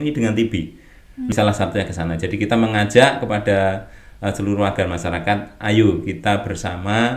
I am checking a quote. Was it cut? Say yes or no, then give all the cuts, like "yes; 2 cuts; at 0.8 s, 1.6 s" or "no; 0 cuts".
yes; 1 cut; at 1.3 s